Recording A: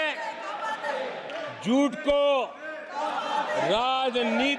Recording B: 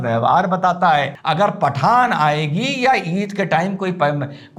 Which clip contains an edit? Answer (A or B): B